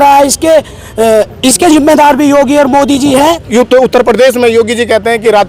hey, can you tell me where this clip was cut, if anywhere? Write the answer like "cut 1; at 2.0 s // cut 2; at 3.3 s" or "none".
cut 1; at 3.4 s